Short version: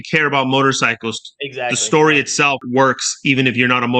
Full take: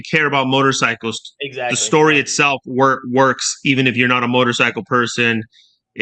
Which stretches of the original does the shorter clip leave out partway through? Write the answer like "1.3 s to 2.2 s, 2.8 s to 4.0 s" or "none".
2.6 s to 3.0 s

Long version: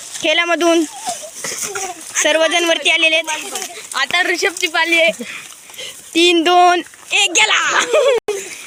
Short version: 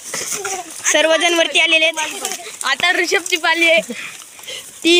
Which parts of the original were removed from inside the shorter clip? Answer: none

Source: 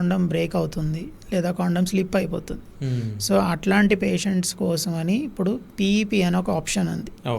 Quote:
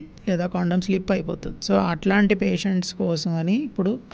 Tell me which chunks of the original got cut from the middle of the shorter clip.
2.6 s to 3.1 s

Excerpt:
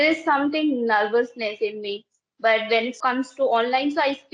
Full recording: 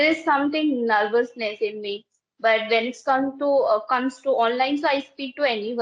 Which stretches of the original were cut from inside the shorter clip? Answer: 3.0 s to 3.8 s

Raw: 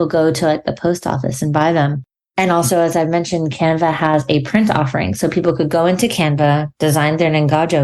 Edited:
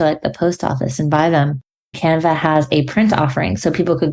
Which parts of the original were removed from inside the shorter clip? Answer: 2.3 s to 3.5 s

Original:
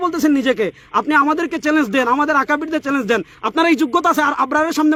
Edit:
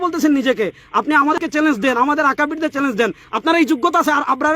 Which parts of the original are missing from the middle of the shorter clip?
1.4 s to 1.5 s

